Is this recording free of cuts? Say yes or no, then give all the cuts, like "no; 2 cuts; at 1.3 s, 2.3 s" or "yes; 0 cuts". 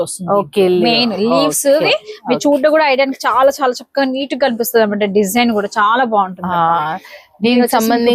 yes; 0 cuts